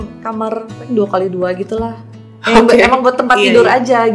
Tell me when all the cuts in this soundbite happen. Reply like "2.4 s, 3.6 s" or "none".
none

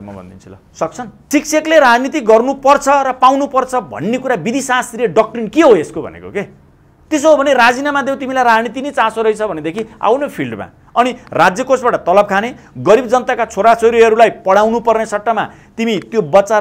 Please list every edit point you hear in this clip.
1.2 s

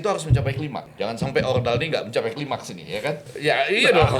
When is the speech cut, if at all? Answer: 0.8 s, 3.3 s

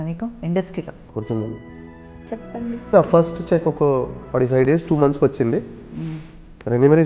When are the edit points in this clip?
1.0 s, 2.9 s

